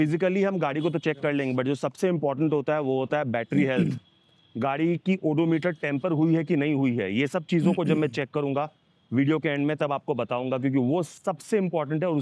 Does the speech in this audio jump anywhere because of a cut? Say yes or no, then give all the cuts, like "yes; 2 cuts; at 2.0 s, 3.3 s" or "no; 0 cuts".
no; 0 cuts